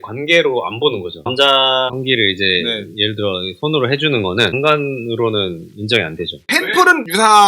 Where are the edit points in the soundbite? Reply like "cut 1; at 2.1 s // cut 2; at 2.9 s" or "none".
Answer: cut 1; at 1.3 s // cut 2; at 4.5 s